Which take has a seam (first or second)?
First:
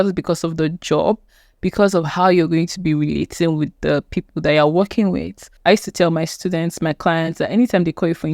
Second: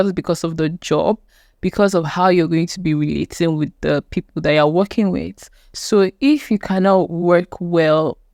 first